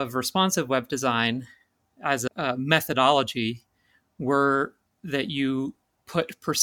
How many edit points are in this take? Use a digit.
1